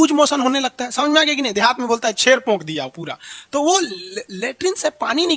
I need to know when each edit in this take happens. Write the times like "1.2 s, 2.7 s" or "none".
none